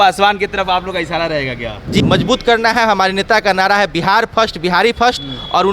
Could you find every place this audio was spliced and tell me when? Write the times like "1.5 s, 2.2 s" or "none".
2.0 s